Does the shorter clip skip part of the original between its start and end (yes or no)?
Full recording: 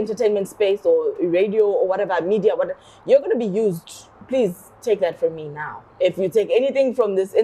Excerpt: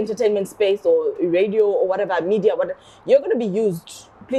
no